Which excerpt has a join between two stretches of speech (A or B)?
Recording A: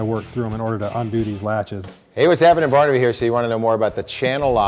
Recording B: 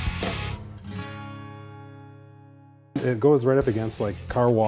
A